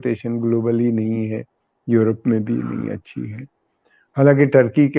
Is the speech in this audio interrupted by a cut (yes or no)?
no